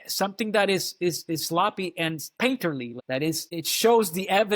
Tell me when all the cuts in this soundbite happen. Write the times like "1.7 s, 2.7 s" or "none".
2.3 s, 3.0 s

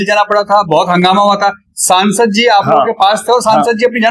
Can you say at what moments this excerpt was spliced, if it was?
none

